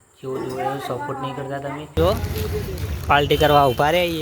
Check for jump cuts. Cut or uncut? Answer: cut